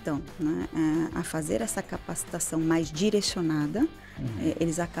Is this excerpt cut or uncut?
uncut